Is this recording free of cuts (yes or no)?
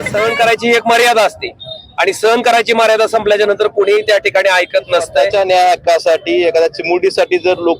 no